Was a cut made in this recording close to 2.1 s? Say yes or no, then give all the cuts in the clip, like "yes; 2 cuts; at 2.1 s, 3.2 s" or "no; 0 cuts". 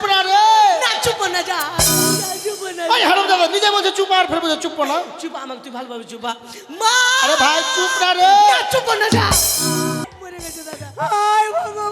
no; 1 cut; at 10.0 s